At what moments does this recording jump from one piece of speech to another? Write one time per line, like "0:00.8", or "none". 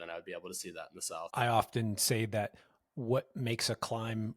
0:01.3

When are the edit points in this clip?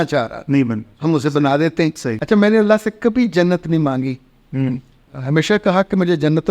0:02.1

